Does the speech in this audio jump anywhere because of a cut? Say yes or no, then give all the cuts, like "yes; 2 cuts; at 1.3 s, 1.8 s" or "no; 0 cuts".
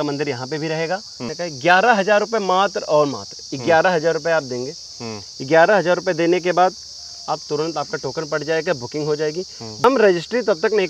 yes; 2 cuts; at 1.3 s, 9.8 s